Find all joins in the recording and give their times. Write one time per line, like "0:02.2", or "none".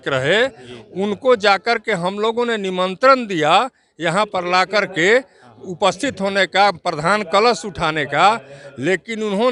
none